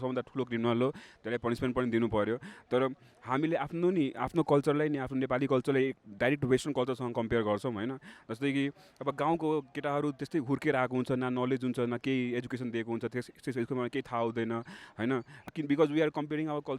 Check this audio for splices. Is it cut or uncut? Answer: cut